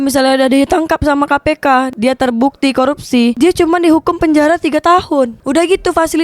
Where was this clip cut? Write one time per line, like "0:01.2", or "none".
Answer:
0:01.9
0:03.4
0:05.4